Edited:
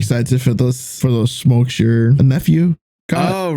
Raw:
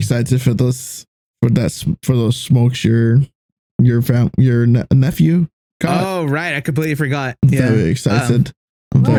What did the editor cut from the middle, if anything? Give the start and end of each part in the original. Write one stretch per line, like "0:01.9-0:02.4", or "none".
0:00.9-0:02.0
0:03.2-0:04.9